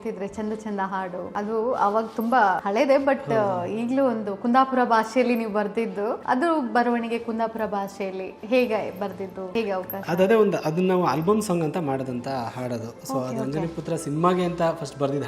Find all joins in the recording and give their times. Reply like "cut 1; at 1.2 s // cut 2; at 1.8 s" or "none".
cut 1; at 1.3 s // cut 2; at 2.6 s // cut 3; at 6.2 s // cut 4; at 9.4 s